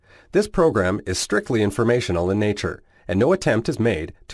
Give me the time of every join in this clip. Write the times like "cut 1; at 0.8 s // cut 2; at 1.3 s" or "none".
none